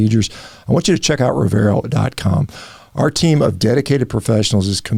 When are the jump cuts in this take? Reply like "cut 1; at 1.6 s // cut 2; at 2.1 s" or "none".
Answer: none